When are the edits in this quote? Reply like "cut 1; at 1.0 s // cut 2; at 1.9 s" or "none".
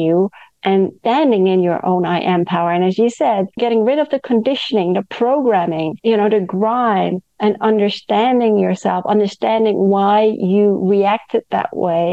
cut 1; at 1.0 s // cut 2; at 3.5 s // cut 3; at 5.9 s